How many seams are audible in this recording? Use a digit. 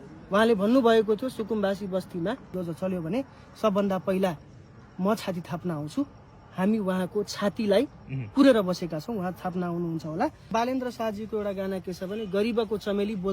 2